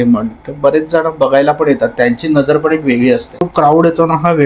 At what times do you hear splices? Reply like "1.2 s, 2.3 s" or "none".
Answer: 3.5 s